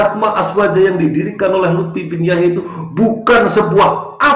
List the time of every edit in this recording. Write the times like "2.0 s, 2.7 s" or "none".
none

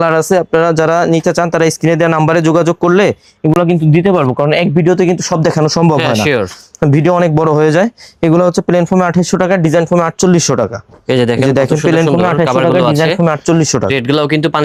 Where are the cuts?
none

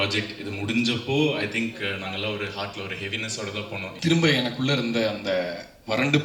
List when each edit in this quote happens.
3.9 s

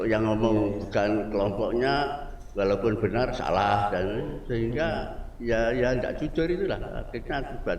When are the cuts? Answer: none

